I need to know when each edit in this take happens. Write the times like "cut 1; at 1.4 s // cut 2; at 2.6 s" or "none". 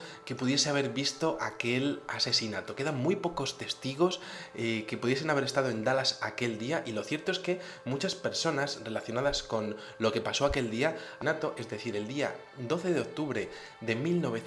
none